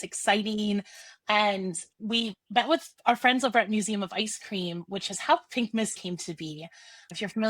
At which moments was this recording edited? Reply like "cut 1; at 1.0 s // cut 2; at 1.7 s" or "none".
cut 1; at 3.0 s // cut 2; at 6.0 s